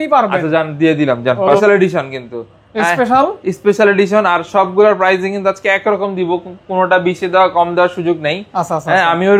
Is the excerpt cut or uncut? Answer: cut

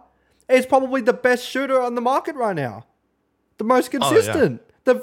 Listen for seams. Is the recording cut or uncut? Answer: uncut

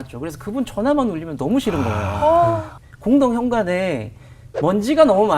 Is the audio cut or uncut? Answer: cut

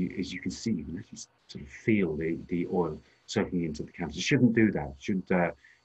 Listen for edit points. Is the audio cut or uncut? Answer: uncut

